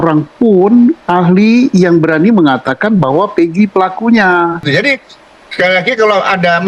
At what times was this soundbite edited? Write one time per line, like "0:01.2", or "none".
0:04.7